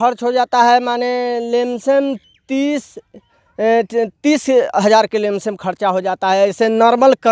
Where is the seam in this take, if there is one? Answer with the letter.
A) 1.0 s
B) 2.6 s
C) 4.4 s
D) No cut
D